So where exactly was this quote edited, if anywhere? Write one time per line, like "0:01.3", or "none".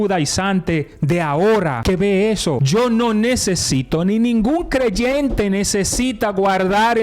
0:01.8
0:02.6